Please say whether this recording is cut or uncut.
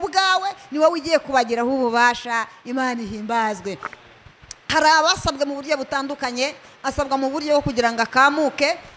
uncut